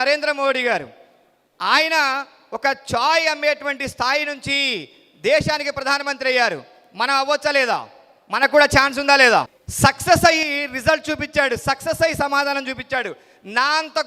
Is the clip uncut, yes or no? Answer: no